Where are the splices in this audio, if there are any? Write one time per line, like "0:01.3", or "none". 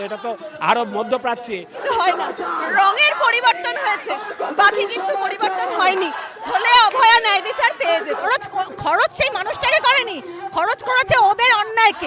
0:01.8
0:08.2